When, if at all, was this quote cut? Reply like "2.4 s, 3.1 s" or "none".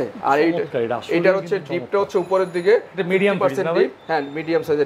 none